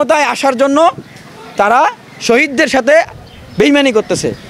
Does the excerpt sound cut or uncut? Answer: uncut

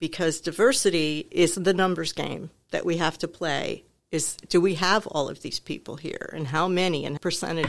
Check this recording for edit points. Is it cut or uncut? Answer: uncut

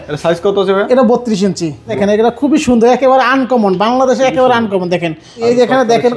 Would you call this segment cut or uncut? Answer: cut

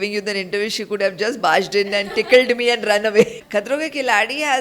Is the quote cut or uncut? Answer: cut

